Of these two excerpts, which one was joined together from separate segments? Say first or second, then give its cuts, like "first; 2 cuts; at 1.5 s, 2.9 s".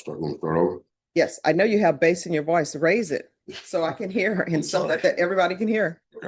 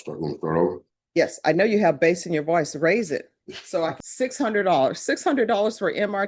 second; 1 cut; at 4.0 s